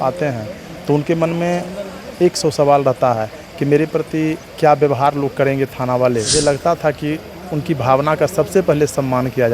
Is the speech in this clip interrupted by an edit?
yes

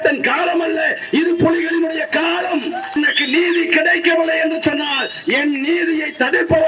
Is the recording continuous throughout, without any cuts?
no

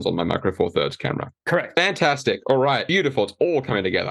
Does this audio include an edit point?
yes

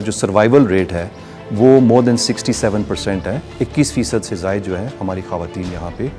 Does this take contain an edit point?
yes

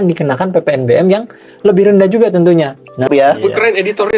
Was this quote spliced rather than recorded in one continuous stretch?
yes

